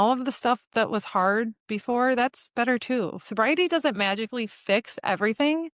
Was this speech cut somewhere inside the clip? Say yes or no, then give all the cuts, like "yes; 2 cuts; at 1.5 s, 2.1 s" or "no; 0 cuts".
yes; 1 cut; at 3.2 s